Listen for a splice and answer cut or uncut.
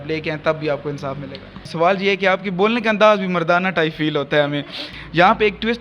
cut